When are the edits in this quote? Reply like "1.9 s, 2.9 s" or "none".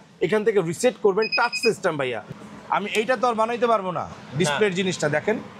2.2 s